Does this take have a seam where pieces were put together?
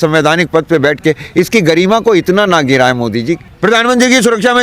yes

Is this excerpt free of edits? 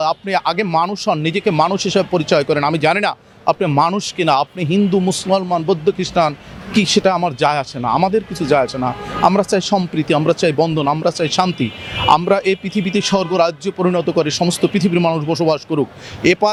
yes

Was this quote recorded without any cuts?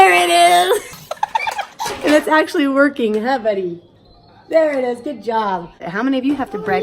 no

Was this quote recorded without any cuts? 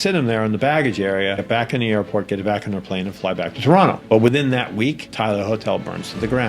no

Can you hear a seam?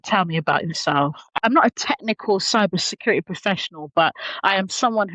yes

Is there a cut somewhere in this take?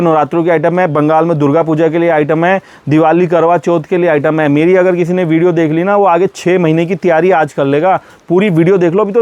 no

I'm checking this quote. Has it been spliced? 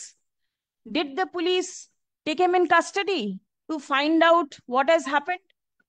no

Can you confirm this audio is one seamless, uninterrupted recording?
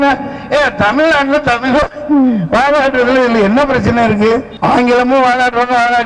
no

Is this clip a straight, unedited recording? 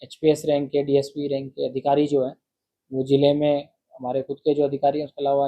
yes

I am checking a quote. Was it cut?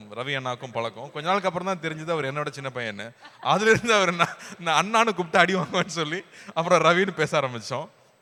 no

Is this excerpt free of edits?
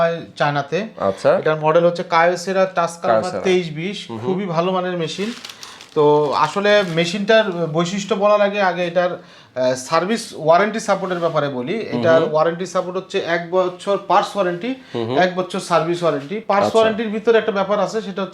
yes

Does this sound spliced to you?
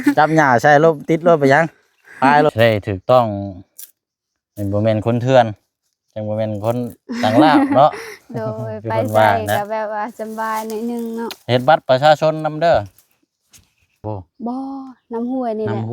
yes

